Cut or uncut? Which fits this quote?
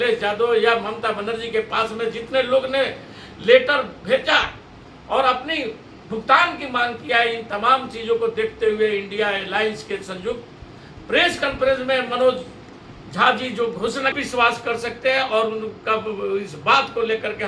cut